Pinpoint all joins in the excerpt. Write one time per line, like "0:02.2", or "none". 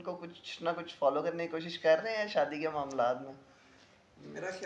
none